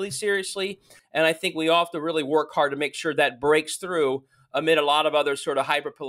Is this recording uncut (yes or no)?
no